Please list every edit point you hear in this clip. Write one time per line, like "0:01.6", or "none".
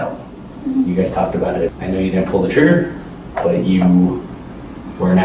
0:01.8